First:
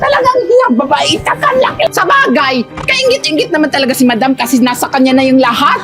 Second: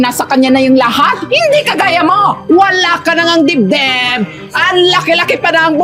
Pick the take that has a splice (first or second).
first